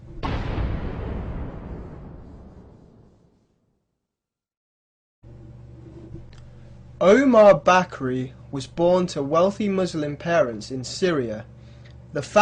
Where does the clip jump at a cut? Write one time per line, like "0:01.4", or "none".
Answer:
none